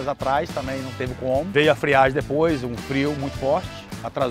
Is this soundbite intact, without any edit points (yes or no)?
no